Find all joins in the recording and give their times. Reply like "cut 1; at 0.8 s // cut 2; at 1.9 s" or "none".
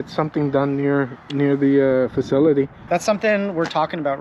cut 1; at 2.8 s